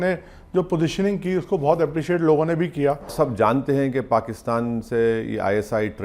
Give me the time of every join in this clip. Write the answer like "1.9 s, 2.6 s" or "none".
3.1 s